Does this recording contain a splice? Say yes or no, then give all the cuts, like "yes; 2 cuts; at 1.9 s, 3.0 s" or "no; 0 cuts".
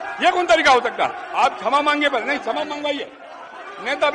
yes; 1 cut; at 1.2 s